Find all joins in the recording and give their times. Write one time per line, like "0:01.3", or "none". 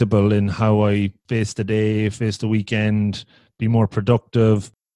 0:01.2